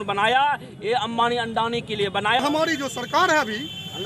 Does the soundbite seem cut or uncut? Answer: cut